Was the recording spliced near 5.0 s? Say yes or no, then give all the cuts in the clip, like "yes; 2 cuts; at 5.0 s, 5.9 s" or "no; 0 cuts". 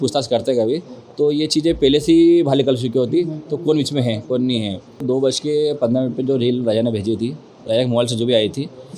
yes; 1 cut; at 5.0 s